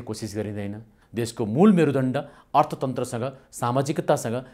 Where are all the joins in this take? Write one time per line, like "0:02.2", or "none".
0:01.0